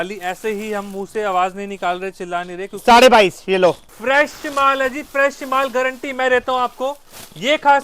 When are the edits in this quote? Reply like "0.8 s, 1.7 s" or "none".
3.9 s